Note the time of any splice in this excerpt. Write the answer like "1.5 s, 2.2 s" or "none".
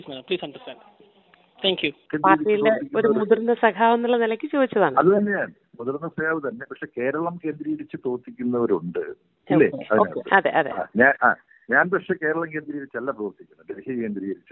2.0 s